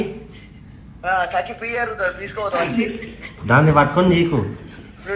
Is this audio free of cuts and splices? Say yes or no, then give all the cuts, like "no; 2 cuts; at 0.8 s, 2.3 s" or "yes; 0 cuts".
yes; 0 cuts